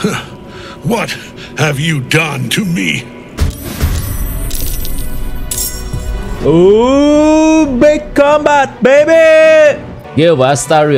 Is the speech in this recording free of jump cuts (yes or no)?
no